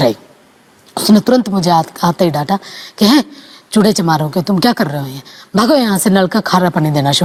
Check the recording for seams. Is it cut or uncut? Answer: uncut